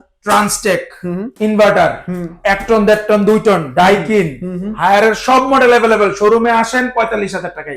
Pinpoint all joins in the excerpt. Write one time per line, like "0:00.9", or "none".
0:01.3